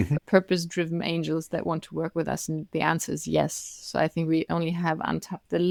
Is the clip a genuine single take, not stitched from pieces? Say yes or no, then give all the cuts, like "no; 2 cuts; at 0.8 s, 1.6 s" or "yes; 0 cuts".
yes; 0 cuts